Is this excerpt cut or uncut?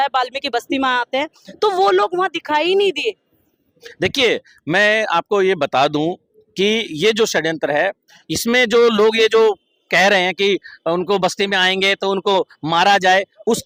uncut